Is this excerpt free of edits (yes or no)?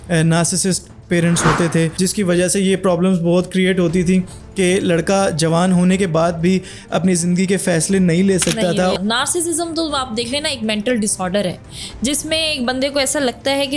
no